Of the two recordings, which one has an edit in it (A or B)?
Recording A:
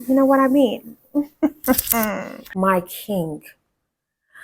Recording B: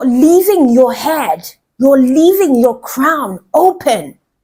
A